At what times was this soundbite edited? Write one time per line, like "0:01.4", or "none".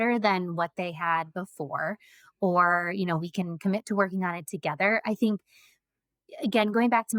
none